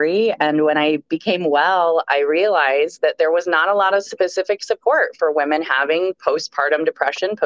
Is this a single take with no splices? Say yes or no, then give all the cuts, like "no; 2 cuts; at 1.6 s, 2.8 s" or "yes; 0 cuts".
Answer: yes; 0 cuts